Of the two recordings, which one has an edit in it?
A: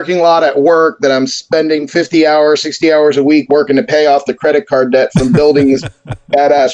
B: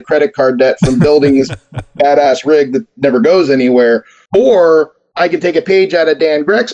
B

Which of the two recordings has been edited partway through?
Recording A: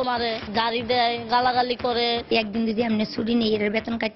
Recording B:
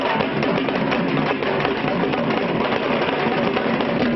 A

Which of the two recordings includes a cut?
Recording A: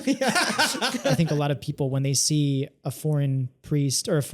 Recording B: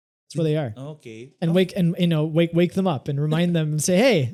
A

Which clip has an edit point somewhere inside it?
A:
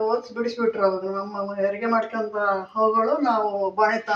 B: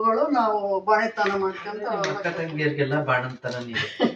B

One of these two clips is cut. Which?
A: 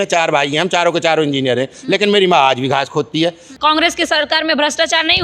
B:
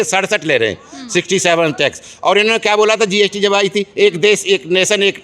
A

